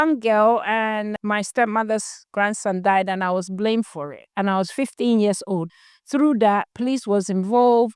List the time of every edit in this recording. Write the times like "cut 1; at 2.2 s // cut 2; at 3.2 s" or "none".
cut 1; at 1.1 s // cut 2; at 5.7 s